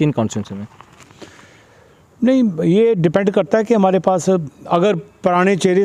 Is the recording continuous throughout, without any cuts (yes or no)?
yes